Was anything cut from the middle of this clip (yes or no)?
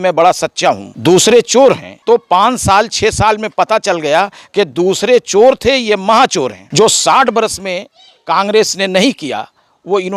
yes